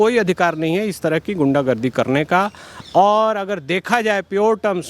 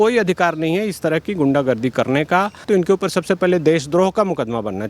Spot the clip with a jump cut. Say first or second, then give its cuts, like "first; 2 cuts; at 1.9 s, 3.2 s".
second; 1 cut; at 2.6 s